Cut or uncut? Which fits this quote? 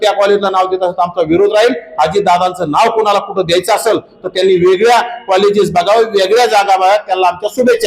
uncut